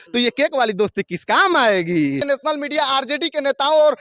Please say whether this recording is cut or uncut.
cut